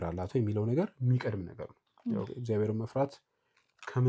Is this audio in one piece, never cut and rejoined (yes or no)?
yes